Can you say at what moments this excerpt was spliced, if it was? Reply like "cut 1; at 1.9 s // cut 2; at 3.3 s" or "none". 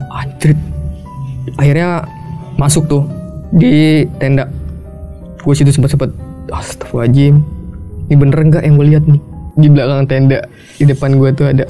cut 1; at 9.4 s